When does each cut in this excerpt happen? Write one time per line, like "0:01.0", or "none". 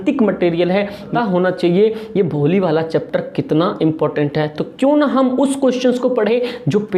0:01.1